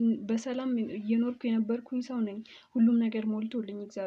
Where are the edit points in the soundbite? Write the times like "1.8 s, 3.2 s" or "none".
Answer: none